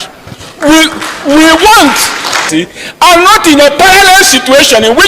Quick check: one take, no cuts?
no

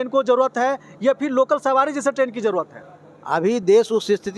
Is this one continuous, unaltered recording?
yes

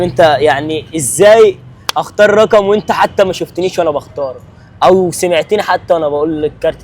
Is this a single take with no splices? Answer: yes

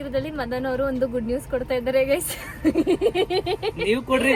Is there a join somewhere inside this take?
no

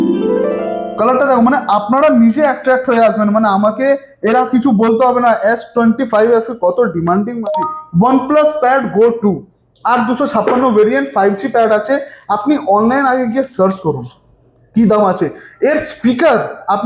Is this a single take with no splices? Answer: no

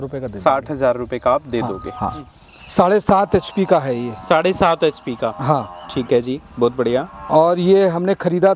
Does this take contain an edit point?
yes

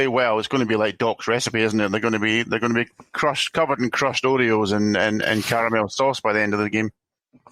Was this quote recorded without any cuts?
yes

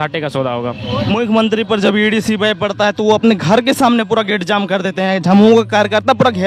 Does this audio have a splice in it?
no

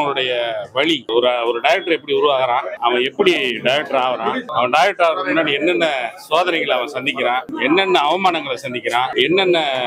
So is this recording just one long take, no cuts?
no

